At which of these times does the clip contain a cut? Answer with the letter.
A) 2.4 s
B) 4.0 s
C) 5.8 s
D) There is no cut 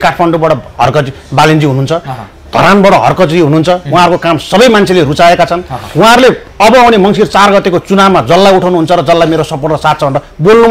D